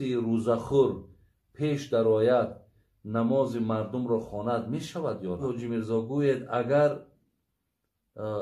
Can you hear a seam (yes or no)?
yes